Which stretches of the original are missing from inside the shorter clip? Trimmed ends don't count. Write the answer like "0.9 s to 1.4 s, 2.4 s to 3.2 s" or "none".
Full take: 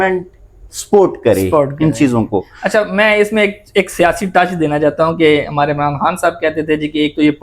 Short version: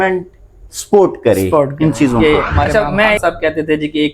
3.2 s to 6.2 s

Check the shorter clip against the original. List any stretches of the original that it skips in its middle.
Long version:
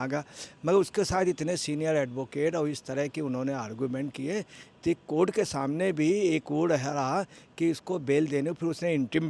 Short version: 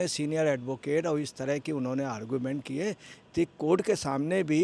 none

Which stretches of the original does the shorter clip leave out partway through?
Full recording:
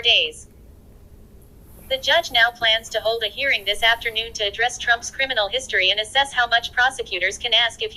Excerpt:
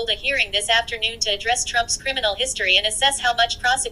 none

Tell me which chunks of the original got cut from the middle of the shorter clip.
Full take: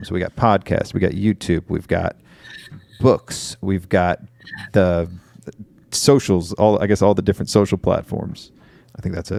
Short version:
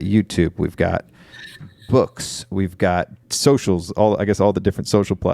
4.3 s to 5.8 s

